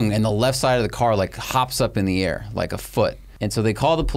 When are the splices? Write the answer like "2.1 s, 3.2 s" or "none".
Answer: 3.3 s